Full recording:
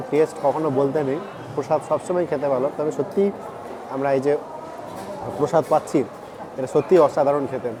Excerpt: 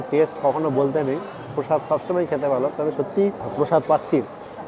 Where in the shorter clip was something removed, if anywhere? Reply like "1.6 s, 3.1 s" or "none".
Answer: 3.4 s